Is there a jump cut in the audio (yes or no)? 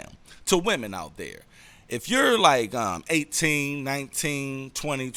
no